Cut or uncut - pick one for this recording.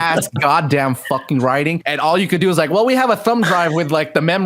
cut